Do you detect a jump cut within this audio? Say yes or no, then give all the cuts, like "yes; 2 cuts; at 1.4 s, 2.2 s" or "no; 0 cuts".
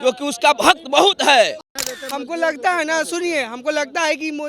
yes; 1 cut; at 1.6 s